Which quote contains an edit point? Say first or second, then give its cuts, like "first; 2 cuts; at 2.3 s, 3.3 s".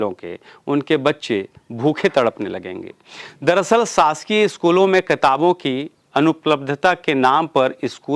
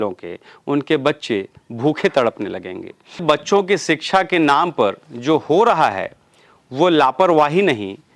second; 1 cut; at 3.2 s